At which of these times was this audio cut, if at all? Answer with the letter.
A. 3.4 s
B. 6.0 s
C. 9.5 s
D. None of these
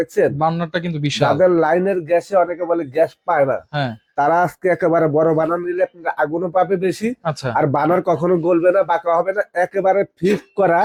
D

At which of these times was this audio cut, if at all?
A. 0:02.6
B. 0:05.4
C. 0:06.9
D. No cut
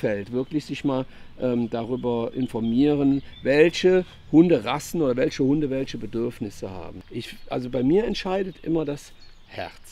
C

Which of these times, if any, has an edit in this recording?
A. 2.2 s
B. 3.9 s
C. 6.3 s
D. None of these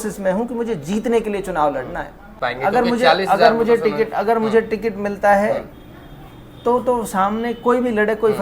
A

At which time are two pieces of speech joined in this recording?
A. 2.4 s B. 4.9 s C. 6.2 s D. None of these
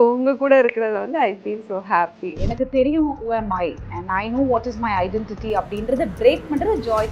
A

